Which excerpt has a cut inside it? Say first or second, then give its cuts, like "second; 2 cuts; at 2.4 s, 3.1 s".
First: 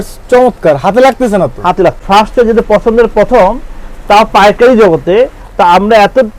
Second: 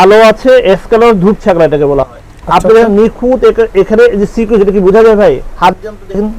first; 1 cut; at 2.0 s